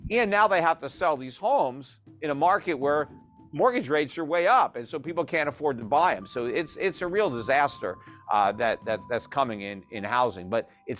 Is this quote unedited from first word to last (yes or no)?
yes